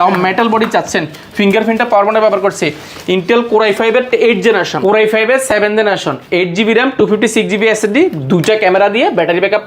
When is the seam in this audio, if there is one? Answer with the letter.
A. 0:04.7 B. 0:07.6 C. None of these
A